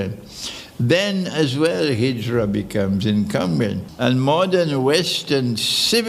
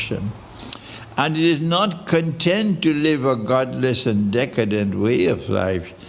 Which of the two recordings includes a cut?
first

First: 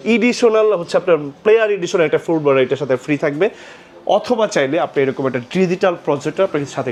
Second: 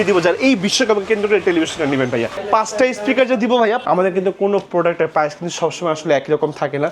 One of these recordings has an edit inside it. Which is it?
second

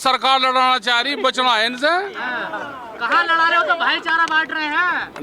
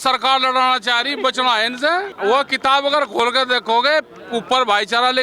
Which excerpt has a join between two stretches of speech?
second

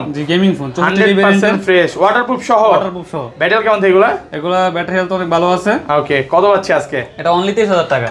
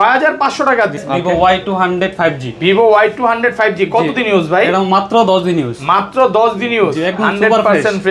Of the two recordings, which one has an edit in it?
second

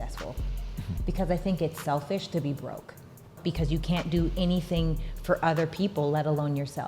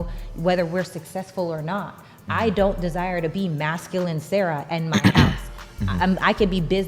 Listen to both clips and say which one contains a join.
first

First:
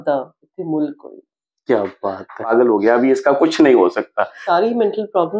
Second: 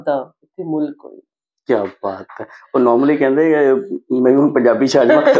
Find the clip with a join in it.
first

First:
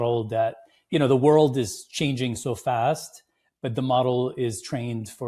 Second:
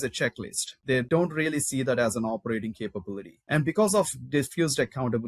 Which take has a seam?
second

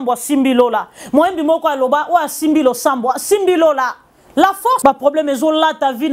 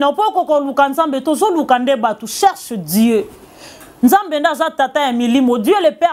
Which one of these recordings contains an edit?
first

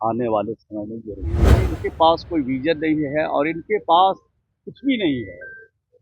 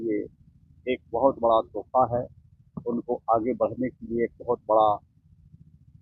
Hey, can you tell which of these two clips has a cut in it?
first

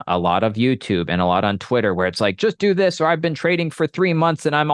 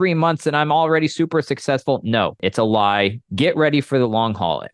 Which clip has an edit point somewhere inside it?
second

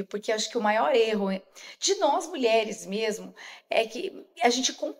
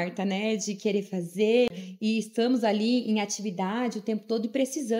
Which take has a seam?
second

